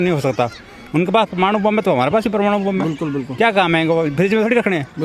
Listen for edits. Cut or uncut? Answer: uncut